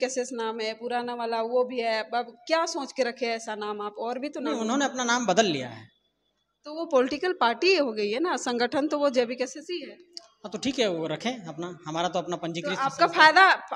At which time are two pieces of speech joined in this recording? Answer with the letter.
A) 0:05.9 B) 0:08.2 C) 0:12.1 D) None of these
D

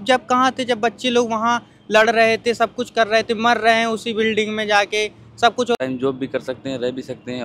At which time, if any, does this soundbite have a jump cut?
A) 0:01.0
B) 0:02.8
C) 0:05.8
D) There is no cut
C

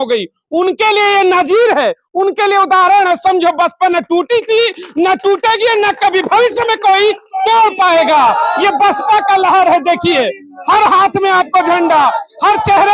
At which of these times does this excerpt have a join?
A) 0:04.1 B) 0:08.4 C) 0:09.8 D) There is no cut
D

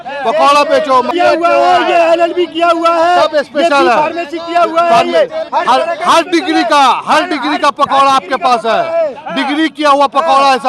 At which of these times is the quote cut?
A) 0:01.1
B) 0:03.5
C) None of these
A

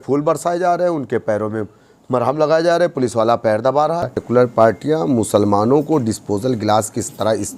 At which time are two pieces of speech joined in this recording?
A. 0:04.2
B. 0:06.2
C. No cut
A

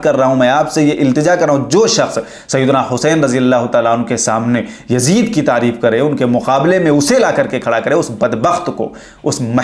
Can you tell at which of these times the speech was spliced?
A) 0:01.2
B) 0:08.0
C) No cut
C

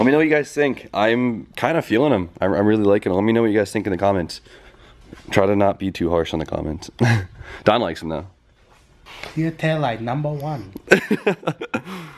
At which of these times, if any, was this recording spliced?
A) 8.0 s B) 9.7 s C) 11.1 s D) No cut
A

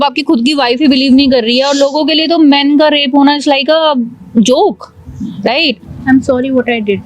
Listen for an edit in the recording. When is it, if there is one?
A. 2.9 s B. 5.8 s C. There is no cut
B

